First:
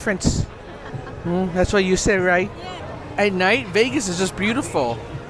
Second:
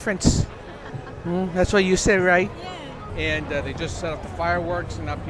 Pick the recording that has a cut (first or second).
second